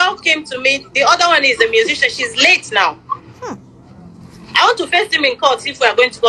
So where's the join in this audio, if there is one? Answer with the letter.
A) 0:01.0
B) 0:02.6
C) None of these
C